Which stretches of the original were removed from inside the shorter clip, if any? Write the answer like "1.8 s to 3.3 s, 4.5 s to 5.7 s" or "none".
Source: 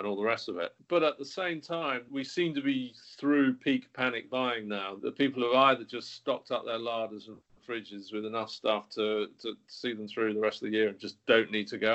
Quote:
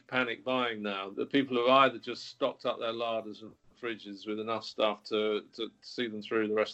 none